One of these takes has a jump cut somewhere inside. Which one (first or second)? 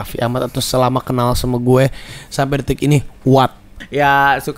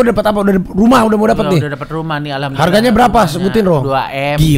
first